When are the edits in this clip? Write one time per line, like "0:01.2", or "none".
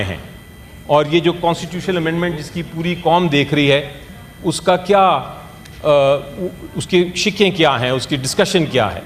none